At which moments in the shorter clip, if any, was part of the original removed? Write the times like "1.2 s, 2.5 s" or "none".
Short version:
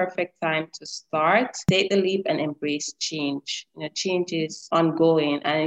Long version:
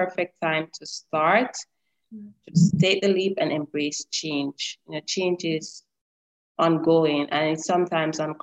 1.7 s, 4.6 s